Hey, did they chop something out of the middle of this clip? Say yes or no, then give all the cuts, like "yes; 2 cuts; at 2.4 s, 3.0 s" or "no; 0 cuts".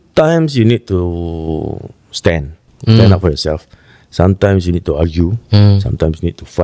no; 0 cuts